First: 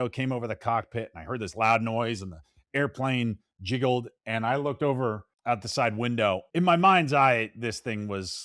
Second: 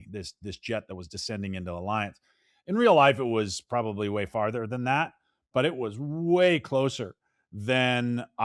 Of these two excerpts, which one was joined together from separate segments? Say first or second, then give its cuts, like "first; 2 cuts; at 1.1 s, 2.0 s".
first; 2 cuts; at 5.3 s, 6.5 s